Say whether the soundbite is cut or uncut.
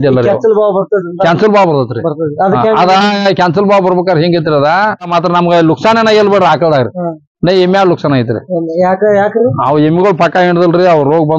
cut